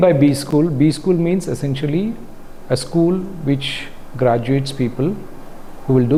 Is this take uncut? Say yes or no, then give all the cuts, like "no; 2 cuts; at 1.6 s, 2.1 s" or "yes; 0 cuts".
yes; 0 cuts